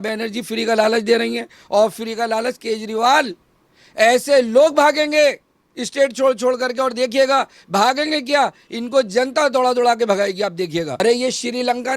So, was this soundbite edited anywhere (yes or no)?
yes